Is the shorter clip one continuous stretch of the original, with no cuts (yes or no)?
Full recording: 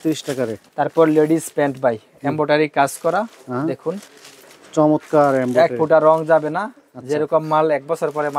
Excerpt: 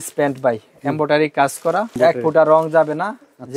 no